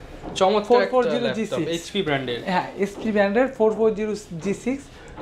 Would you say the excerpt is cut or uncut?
uncut